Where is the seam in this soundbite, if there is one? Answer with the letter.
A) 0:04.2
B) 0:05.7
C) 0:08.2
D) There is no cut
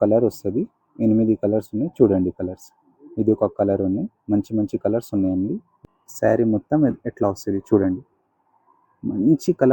B